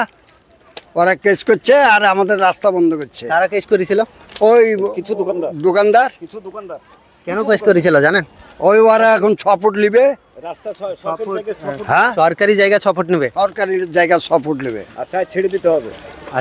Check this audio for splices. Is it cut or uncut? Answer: uncut